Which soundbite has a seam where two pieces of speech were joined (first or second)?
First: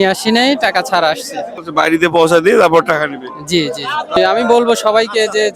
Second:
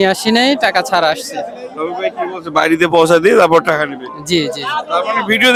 first